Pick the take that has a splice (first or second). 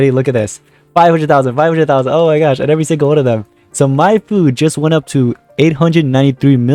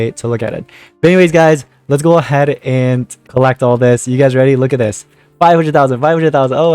second